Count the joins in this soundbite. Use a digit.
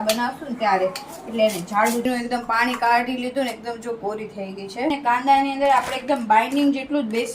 2